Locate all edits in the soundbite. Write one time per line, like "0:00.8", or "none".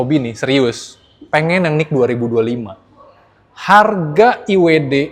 none